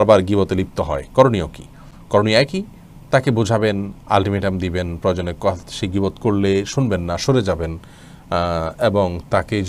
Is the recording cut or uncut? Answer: uncut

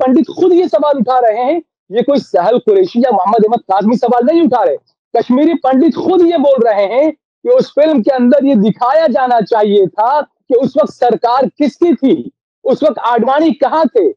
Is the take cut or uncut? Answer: uncut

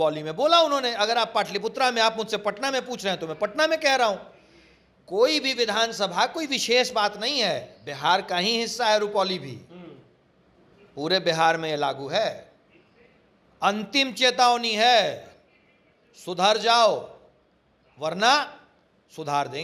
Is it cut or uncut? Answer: uncut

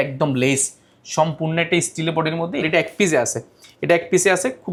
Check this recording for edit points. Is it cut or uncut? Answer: uncut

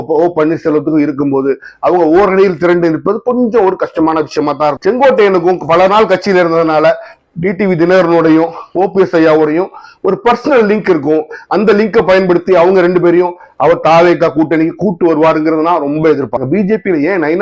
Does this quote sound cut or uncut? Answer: cut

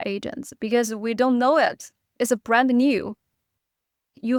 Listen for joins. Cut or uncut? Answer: uncut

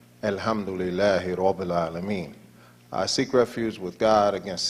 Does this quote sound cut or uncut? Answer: cut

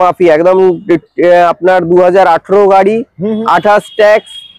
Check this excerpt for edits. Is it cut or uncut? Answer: uncut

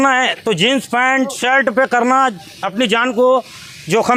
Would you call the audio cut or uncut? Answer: uncut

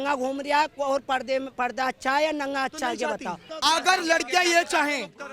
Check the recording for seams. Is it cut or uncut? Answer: cut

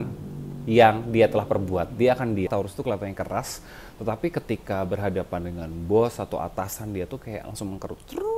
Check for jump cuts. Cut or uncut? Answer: cut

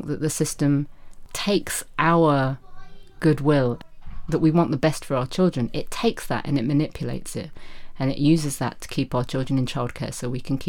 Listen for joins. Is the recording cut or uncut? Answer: cut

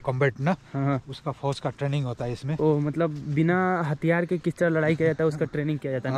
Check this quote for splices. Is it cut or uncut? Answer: uncut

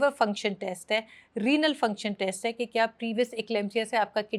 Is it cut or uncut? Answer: uncut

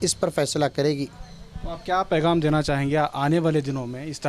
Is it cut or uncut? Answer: uncut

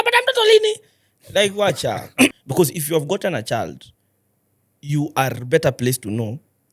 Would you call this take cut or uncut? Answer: cut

